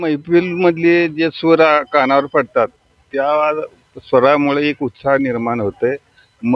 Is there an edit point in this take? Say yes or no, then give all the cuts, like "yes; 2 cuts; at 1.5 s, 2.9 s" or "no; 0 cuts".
no; 0 cuts